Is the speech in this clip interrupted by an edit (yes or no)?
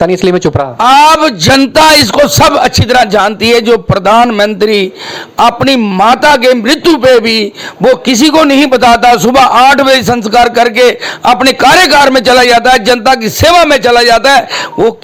no